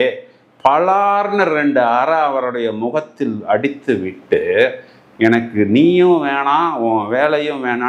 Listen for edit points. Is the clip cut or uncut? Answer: uncut